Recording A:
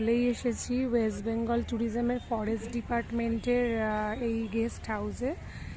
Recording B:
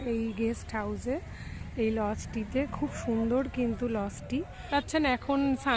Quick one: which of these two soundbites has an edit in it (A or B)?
B